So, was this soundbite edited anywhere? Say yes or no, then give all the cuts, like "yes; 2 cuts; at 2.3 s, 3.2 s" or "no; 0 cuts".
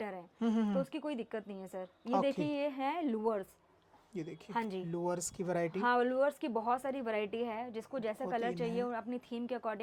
no; 0 cuts